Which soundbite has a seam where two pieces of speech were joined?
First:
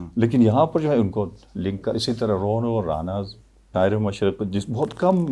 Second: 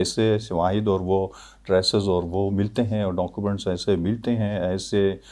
first; 1 cut; at 3.7 s

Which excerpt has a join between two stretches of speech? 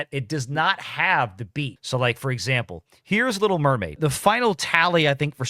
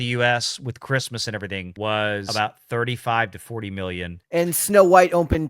second; 3 cuts; at 1.7 s, 2.3 s, 4.1 s

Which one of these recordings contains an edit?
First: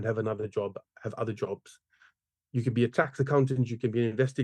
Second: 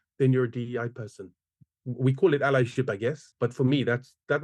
second; 1 cut; at 3.3 s

